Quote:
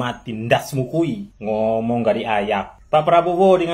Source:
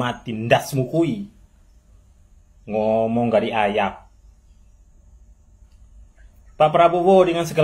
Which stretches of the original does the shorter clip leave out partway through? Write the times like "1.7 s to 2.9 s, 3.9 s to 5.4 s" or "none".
1.3 s to 2.6 s, 4.0 s to 6.4 s